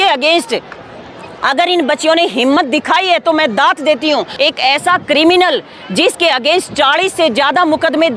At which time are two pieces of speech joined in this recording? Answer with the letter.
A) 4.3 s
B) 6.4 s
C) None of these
A